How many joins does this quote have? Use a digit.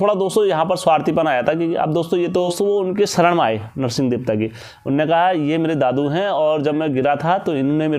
1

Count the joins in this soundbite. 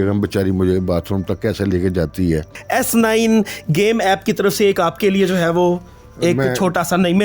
1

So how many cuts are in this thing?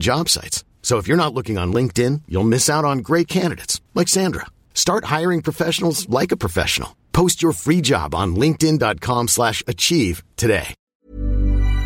1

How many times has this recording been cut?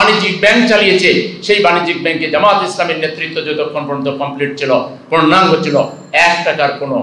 0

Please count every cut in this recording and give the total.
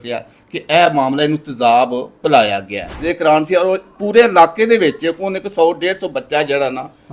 1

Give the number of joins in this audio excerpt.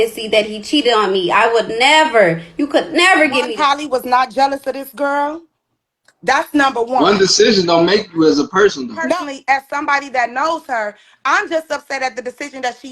2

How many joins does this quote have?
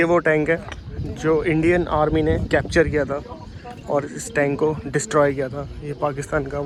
0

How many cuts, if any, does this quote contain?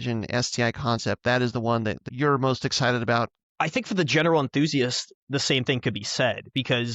2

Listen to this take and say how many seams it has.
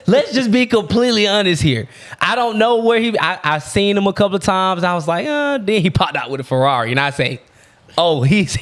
0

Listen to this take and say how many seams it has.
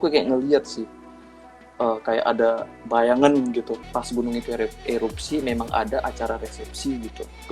1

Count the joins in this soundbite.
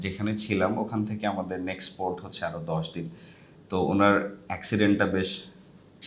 0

